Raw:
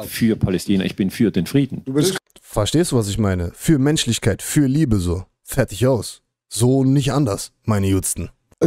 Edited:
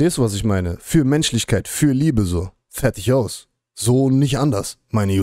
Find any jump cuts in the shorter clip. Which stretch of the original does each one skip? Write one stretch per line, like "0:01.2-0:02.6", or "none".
none